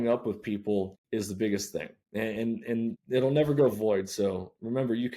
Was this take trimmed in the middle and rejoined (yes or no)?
yes